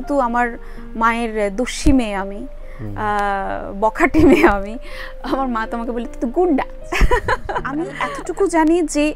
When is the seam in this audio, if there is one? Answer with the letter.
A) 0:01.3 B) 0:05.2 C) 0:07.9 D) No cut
C